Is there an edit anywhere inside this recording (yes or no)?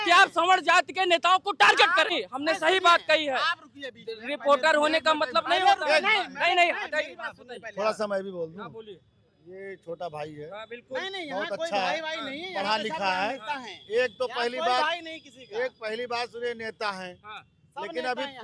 no